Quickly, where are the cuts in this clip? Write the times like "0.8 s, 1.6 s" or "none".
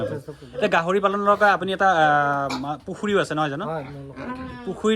none